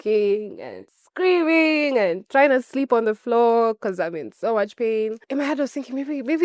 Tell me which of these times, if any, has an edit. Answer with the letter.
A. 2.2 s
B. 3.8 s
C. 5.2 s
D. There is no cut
C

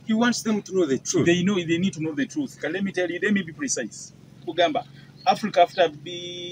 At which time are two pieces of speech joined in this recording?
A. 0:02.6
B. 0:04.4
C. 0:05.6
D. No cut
B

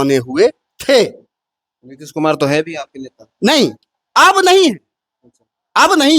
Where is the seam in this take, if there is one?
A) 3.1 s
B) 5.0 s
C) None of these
C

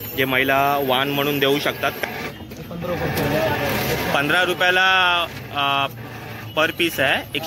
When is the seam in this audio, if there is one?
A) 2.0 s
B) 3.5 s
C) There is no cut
A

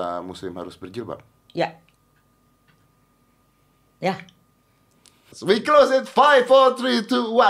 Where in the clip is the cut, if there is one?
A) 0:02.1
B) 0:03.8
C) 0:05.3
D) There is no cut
C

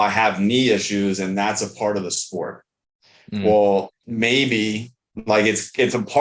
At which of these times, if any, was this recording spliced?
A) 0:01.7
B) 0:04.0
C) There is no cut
B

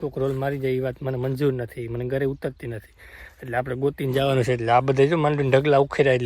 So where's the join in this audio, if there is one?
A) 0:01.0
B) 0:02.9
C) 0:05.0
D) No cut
D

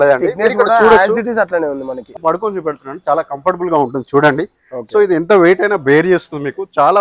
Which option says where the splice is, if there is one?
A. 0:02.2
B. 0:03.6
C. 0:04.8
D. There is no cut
A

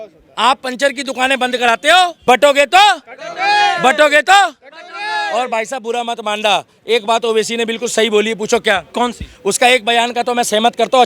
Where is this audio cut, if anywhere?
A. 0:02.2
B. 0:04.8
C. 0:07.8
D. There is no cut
A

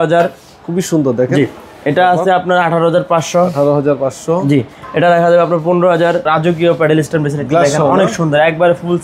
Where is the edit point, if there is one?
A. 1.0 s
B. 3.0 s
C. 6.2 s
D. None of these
C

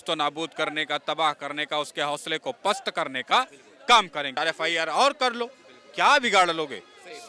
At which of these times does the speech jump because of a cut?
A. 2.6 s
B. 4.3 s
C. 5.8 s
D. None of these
B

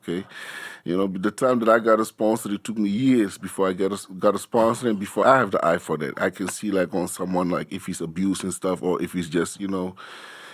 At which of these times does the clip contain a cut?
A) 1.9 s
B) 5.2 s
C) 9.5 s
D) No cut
B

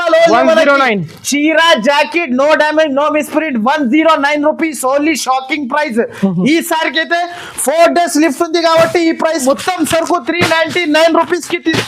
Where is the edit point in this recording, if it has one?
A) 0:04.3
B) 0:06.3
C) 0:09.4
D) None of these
C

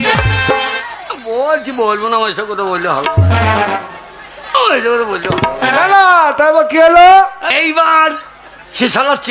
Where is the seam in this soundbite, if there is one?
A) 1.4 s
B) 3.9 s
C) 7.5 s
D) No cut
C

